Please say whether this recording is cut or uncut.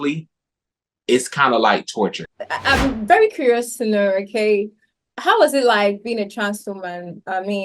cut